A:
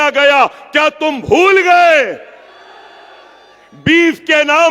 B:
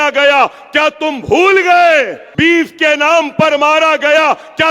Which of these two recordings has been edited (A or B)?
B